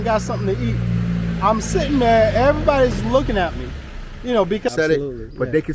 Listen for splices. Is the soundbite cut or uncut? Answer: cut